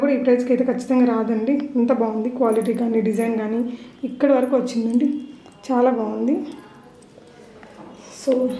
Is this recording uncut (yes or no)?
yes